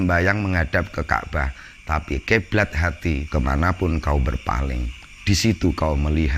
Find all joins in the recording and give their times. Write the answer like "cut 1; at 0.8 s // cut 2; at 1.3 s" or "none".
cut 1; at 3.2 s